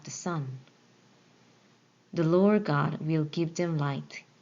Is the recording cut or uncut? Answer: cut